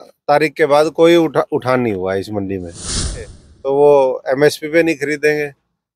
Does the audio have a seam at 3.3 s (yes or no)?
yes